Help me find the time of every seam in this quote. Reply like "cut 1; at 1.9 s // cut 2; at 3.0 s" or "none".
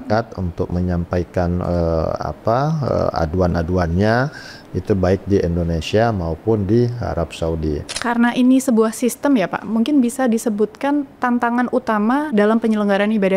cut 1; at 7.9 s // cut 2; at 12.3 s